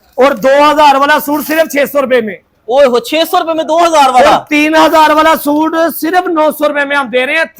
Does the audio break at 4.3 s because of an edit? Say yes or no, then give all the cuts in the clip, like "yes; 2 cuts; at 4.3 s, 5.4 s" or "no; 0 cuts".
no; 0 cuts